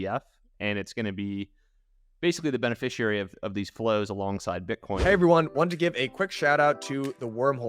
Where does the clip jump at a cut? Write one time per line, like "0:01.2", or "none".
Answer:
0:05.0